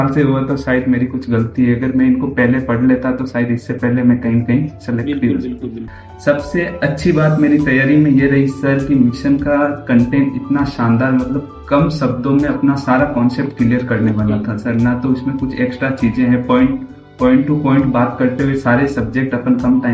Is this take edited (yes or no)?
yes